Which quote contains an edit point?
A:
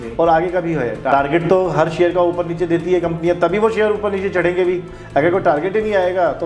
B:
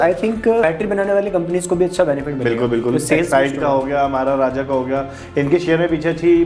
A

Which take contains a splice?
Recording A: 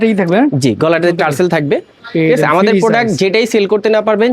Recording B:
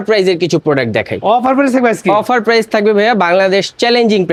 A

